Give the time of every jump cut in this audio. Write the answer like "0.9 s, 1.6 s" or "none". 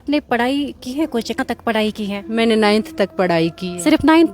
1.4 s